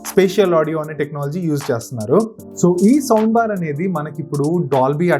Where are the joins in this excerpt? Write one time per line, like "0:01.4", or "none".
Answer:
0:02.4